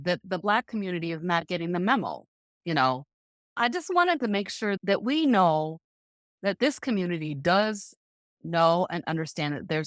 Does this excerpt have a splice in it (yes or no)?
yes